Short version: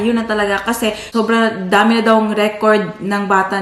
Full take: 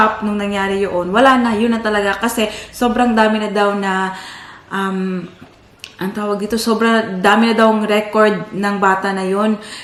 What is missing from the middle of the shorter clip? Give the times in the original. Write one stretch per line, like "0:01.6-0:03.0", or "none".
0:02.6-0:06.6